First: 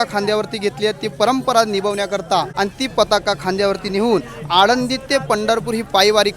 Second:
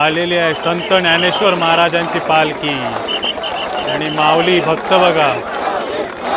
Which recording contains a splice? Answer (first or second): first